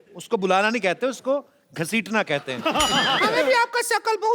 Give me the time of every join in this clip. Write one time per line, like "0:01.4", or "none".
0:03.2